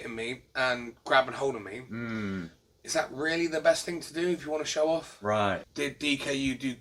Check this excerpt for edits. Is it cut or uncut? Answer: cut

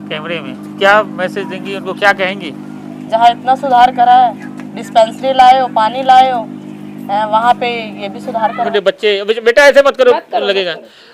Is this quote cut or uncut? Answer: cut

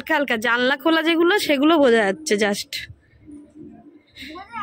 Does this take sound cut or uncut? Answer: uncut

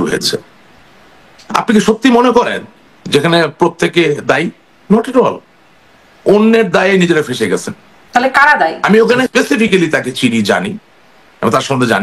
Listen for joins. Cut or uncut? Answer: cut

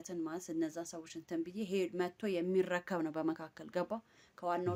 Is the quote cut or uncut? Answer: uncut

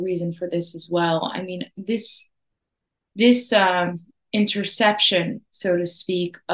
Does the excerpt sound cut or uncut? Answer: uncut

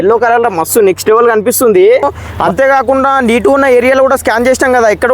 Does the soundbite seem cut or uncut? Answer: cut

